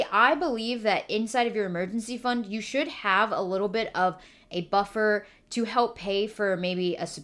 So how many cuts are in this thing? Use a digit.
0